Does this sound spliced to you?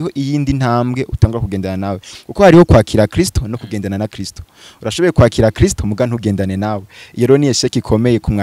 no; 0 cuts

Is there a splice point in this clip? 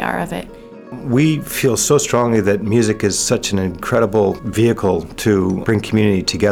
yes; 3 cuts; at 1.0 s, 4.4 s, 5.6 s

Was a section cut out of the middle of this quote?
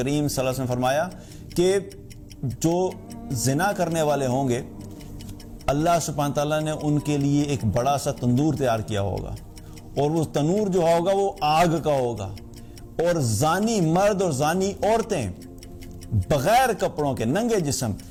no; 0 cuts

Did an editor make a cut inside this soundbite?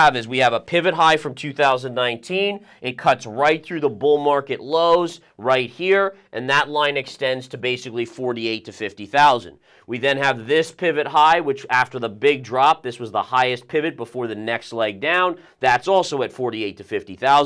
no; 0 cuts

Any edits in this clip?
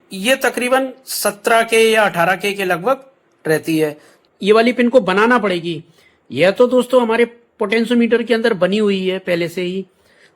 yes; 1 cut; at 4.1 s

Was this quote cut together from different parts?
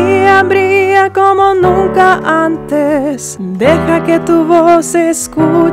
no; 0 cuts

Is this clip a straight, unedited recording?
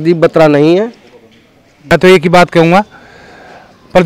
no; 1 cut; at 1.8 s

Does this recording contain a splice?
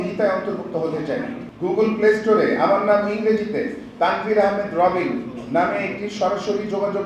yes; 1 cut; at 1.4 s

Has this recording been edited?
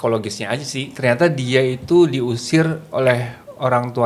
no; 0 cuts

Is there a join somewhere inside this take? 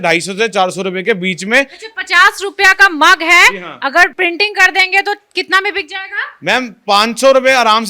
no; 0 cuts

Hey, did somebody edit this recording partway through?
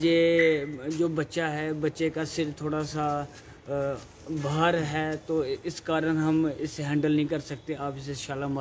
no; 0 cuts

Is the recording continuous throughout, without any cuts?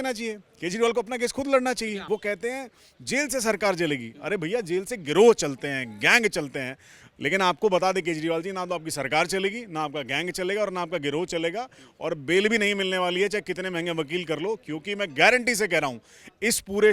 no; 1 cut; at 2.0 s

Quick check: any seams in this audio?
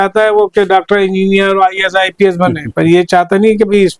no; 0 cuts

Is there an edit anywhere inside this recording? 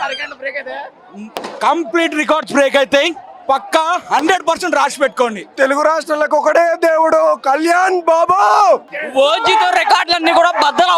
yes; 2 cuts; at 5.5 s, 8.9 s

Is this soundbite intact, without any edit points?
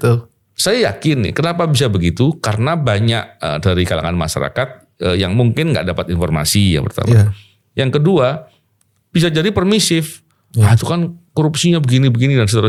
yes; 0 cuts

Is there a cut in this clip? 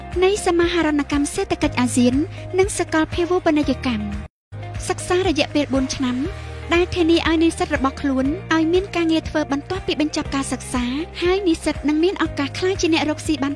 yes; 1 cut; at 4.5 s

